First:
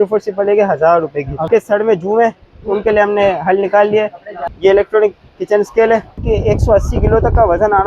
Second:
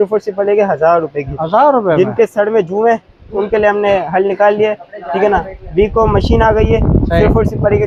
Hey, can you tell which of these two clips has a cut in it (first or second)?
first